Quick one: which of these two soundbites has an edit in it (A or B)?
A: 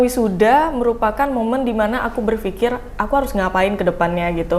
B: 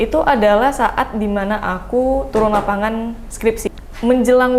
B